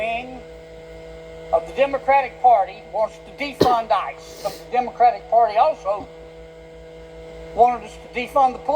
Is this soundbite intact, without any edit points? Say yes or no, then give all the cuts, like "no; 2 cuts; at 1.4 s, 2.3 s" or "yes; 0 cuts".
no; 1 cut; at 4.6 s